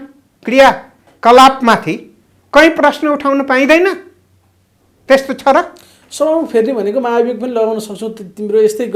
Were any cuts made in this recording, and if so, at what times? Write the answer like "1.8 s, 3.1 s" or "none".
none